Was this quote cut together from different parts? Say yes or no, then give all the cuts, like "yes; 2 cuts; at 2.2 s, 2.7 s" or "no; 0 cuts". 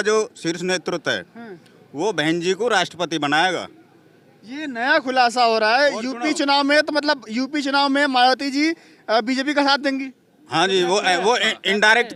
no; 0 cuts